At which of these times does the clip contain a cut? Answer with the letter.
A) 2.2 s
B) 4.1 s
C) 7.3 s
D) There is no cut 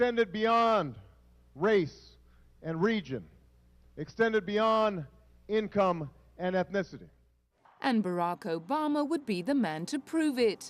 C